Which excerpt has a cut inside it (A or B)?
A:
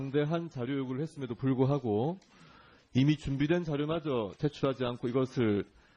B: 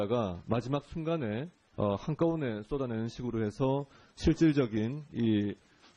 A